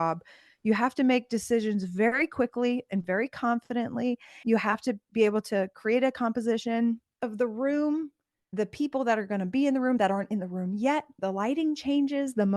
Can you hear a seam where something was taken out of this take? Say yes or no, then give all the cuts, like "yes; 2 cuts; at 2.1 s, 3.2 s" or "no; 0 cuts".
yes; 2 cuts; at 4.4 s, 11.1 s